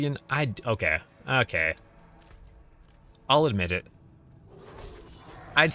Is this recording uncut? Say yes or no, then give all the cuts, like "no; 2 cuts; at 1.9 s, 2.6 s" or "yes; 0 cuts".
yes; 0 cuts